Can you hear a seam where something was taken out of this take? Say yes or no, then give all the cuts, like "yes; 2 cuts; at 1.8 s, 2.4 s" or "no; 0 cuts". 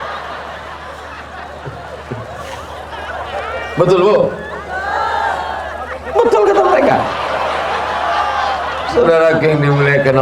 no; 0 cuts